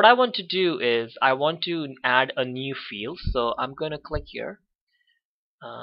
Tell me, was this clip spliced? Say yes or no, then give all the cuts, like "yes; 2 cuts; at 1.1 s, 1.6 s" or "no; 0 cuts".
yes; 1 cut; at 3.5 s